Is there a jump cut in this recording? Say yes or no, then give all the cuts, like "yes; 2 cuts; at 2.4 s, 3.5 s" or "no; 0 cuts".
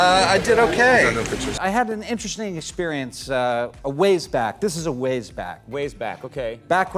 no; 0 cuts